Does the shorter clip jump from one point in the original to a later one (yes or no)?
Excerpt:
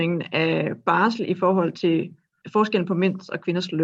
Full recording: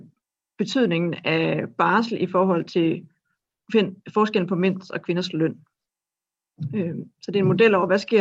yes